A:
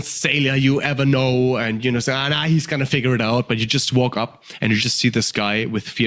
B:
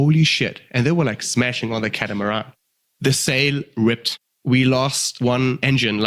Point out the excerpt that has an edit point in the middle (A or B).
B